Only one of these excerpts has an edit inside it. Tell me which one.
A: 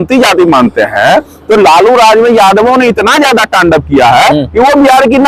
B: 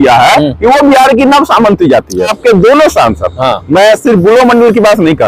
B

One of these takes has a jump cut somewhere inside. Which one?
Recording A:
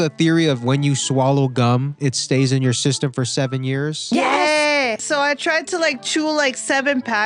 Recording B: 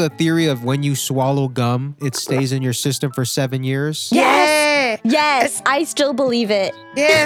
A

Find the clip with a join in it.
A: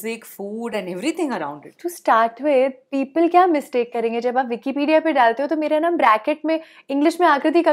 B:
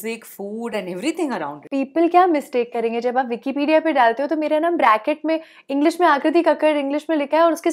B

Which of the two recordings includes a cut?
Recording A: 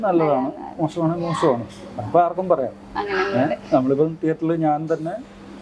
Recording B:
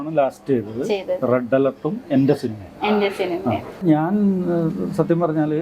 B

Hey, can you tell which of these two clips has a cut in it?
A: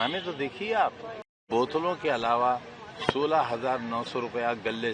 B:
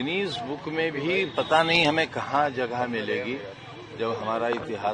A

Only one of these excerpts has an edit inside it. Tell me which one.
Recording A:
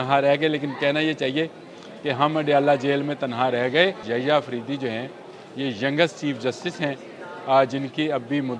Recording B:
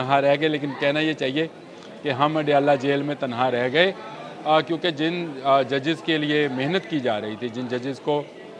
A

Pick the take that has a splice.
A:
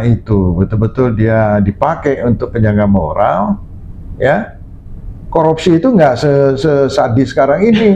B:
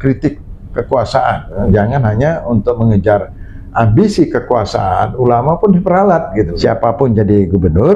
B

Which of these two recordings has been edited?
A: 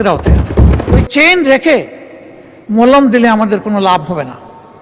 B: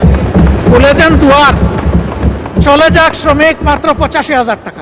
A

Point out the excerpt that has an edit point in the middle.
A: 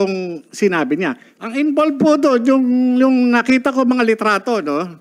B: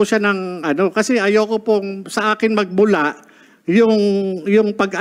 A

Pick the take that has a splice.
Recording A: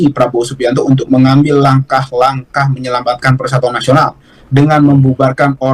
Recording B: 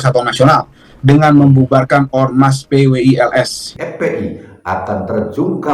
B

